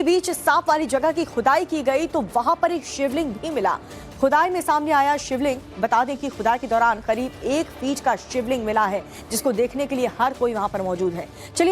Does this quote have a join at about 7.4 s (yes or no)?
yes